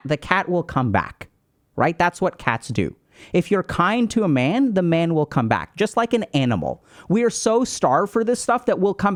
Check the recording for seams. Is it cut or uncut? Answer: uncut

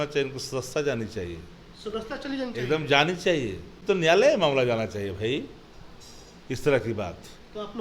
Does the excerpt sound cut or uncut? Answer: cut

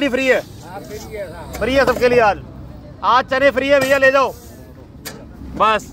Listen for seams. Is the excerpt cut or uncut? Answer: uncut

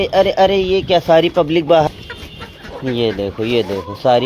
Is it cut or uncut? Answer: cut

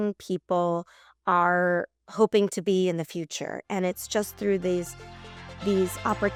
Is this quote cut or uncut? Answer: uncut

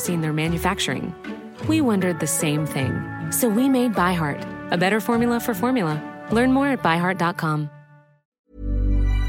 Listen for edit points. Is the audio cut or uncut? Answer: cut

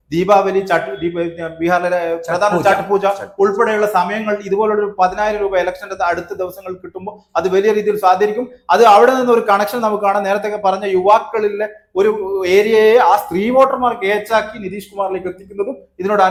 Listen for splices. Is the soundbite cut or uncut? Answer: uncut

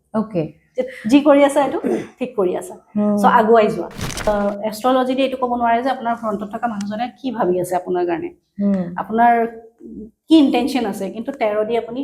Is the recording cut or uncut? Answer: cut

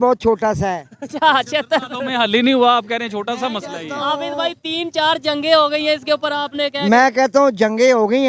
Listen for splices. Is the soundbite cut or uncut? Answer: uncut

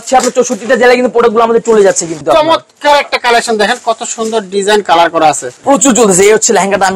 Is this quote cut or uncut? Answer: cut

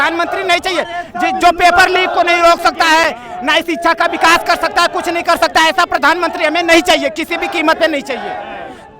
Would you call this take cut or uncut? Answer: uncut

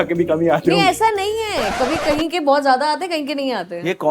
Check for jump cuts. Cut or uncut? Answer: uncut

